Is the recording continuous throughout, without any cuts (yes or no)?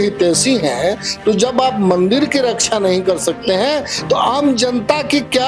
yes